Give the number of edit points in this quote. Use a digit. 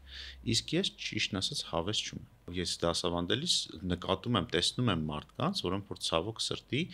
1